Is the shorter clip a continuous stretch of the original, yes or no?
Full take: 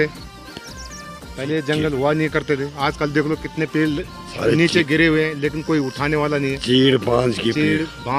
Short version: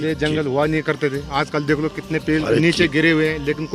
no